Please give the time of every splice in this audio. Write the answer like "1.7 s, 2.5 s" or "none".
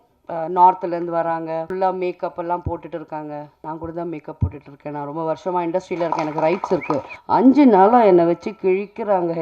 1.7 s, 3.5 s, 7.1 s